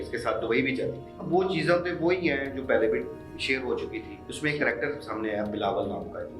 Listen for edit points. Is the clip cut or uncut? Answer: cut